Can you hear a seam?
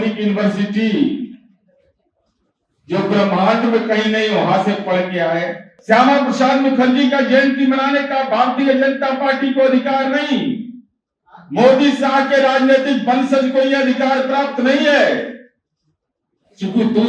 yes; 1 cut; at 5.7 s

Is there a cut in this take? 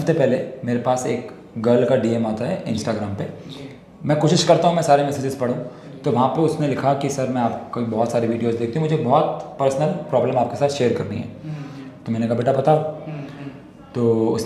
no; 0 cuts

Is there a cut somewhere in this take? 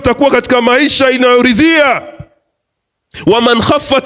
no; 0 cuts

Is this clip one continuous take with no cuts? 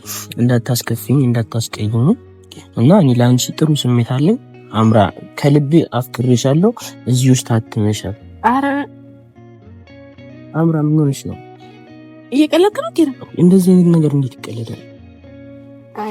yes; 0 cuts

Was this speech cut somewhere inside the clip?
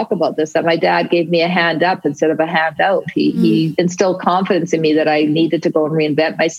yes; 1 cut; at 3.7 s

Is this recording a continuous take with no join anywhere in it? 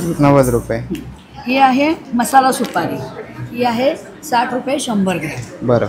yes; 0 cuts

